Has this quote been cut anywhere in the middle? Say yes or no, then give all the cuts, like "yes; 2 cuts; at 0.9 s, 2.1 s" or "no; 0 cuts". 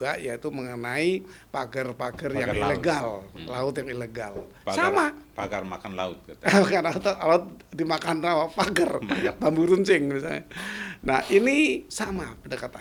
no; 0 cuts